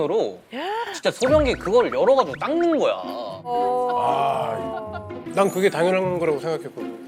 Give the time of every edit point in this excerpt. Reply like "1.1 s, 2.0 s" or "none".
5.1 s